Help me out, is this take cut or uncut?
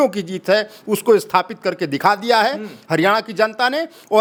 uncut